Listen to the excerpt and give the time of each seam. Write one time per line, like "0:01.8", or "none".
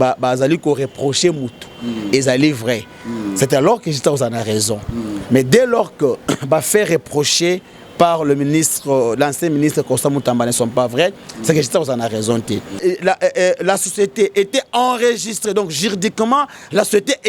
0:12.8